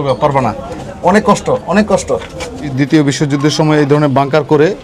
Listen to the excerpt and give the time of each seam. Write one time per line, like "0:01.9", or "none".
0:02.7